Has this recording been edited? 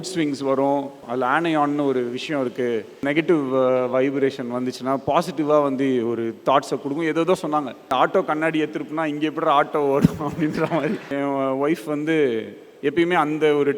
yes; 4 cuts; at 1.0 s, 3.0 s, 7.9 s, 11.1 s

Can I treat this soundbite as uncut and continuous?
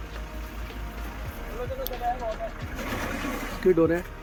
yes; 0 cuts

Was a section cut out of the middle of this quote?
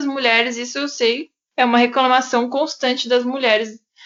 no; 0 cuts

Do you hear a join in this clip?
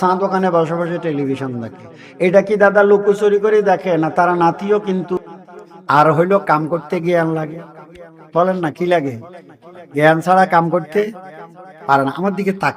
yes; 1 cut; at 5.1 s

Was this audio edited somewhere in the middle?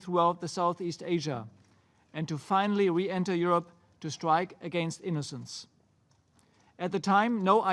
yes; 1 cut; at 3.0 s

